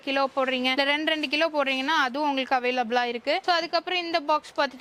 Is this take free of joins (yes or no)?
yes